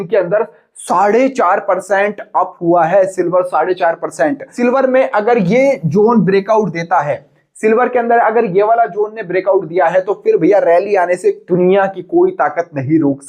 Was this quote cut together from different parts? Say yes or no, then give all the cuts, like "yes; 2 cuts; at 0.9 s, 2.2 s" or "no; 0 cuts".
yes; 1 cut; at 4.5 s